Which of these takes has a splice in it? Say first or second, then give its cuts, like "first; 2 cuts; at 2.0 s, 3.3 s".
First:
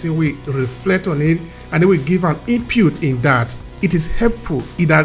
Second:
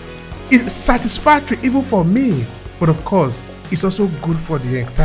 first; 1 cut; at 3.6 s